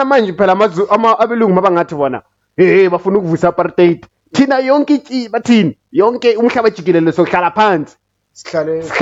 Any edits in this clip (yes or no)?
no